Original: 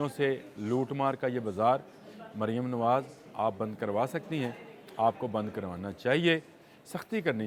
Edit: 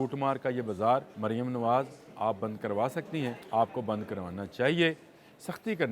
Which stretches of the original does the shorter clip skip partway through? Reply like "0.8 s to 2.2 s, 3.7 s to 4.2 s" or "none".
1.9 s to 2.3 s, 4.6 s to 4.9 s